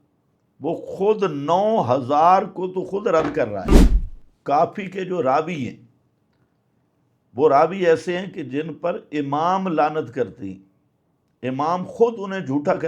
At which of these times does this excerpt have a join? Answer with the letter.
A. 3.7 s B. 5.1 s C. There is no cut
A